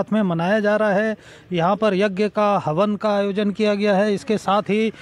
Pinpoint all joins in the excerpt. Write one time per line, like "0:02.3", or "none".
none